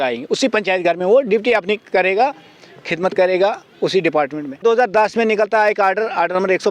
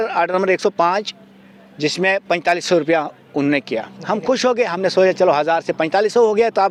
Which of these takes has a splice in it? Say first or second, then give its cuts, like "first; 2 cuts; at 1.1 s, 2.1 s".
first; 1 cut; at 4.6 s